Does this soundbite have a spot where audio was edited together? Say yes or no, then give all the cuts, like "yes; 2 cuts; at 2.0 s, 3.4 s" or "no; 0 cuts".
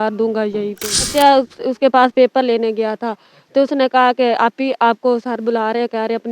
yes; 1 cut; at 1.1 s